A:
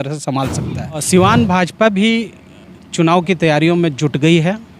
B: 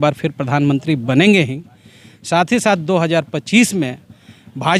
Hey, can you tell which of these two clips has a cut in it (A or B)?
A